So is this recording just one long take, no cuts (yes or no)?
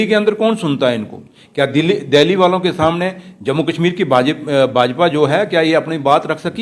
yes